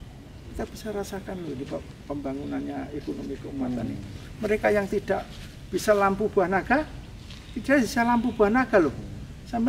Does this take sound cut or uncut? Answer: uncut